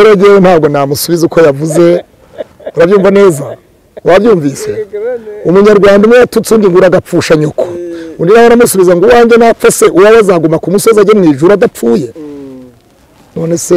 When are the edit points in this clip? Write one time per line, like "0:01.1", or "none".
none